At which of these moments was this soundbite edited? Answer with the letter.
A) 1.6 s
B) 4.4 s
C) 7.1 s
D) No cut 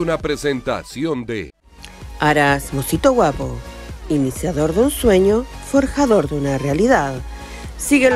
A